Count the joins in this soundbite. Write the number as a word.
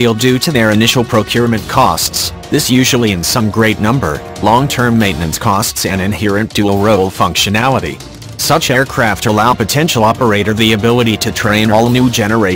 one